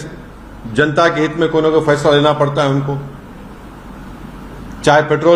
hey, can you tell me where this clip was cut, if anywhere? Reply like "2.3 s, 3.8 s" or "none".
none